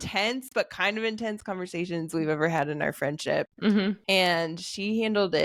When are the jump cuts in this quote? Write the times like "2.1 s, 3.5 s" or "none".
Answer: none